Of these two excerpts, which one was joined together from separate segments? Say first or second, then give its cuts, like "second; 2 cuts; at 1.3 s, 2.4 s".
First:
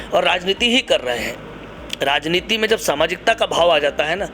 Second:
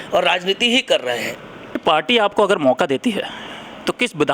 second; 1 cut; at 1.8 s